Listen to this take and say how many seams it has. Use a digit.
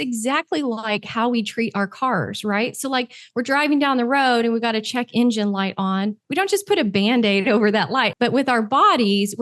1